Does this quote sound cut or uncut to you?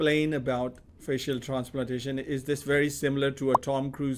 uncut